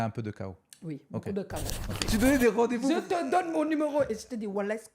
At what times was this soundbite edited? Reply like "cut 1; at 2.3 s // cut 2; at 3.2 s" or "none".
cut 1; at 1.8 s